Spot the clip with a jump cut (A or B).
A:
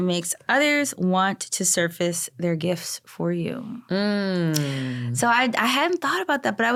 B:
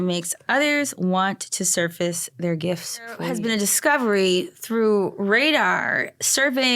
B